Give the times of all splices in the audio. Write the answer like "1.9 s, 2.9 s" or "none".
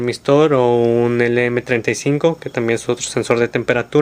2.5 s